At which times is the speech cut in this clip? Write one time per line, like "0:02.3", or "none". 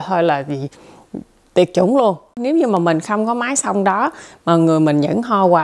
0:02.3